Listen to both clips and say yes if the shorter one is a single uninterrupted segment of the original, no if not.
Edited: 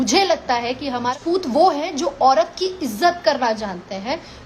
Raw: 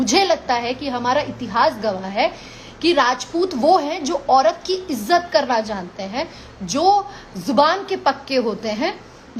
no